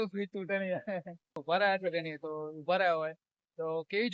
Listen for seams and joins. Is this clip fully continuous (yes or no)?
no